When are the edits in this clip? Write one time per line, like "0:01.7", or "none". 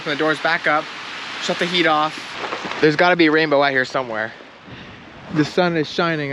none